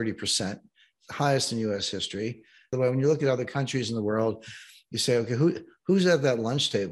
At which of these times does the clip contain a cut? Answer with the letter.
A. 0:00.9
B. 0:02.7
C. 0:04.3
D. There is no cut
B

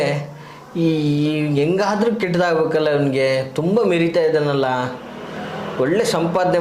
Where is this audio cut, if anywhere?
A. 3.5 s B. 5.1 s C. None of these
C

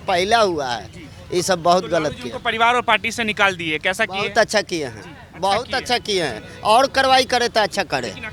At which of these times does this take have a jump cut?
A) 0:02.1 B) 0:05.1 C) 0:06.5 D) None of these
D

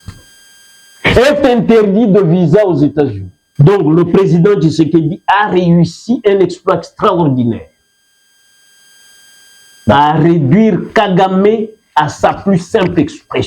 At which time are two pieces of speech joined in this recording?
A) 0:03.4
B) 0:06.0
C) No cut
A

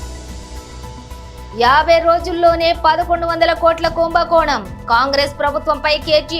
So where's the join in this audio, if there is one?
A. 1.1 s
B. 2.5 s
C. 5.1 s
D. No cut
A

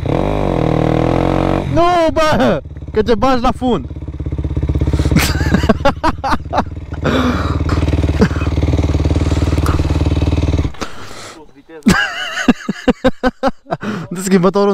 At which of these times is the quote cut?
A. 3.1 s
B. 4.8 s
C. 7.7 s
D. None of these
C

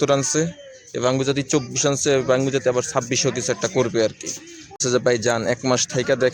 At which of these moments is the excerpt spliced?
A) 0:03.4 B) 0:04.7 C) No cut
B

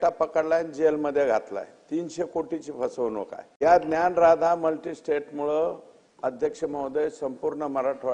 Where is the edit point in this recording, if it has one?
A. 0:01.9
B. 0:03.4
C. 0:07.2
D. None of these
B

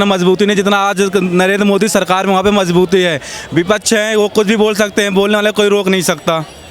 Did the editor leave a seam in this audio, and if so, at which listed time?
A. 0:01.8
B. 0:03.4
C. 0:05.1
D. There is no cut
D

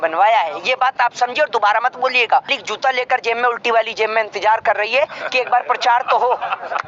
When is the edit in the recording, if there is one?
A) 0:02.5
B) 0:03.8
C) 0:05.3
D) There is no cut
A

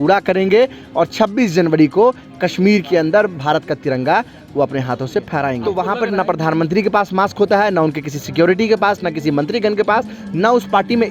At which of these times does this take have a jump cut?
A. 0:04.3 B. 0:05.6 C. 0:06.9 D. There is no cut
B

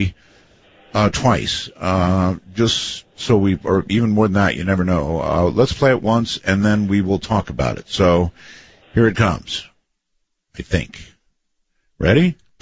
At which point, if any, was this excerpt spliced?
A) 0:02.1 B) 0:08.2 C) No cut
C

